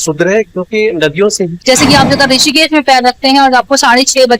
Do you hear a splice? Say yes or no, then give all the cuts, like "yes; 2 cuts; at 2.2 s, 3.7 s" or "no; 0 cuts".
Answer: yes; 1 cut; at 1.5 s